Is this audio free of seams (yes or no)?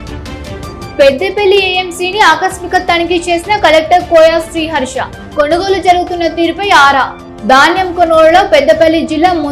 no